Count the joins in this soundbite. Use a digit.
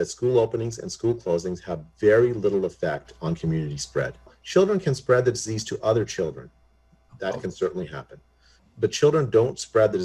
0